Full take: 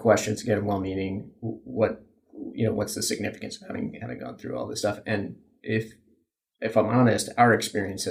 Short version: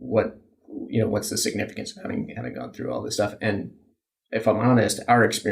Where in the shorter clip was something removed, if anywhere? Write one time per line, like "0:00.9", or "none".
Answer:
0:03.8